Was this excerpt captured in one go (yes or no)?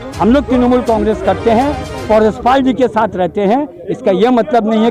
yes